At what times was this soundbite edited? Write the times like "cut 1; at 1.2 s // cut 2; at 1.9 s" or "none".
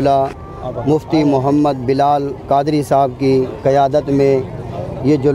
none